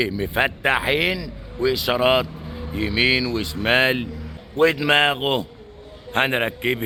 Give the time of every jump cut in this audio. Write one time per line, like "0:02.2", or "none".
none